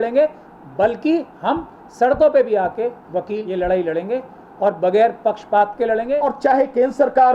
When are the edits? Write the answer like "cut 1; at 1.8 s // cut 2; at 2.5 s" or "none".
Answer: cut 1; at 3.4 s // cut 2; at 6.2 s